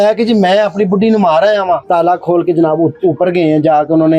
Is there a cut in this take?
yes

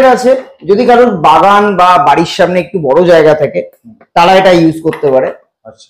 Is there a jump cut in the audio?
no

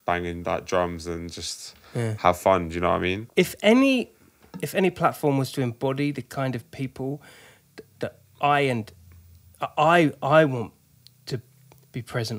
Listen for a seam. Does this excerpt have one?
yes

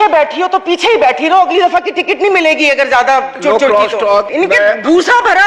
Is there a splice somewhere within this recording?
yes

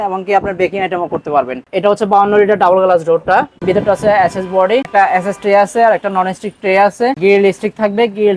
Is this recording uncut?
no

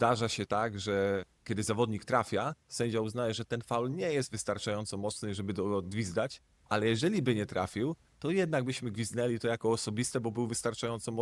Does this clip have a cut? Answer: no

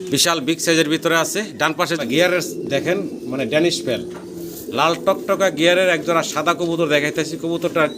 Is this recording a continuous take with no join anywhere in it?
no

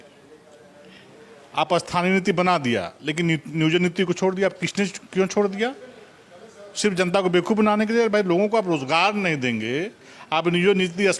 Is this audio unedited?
yes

